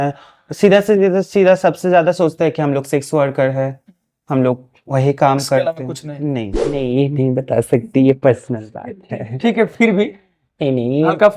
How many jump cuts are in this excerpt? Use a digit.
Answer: 1